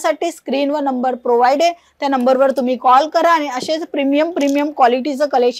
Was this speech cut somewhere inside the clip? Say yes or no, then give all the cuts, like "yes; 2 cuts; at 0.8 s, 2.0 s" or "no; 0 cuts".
no; 0 cuts